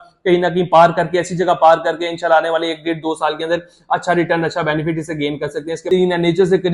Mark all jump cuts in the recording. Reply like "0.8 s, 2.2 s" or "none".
5.9 s